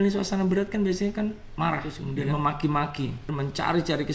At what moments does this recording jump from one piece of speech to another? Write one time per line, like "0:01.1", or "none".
0:02.0
0:03.3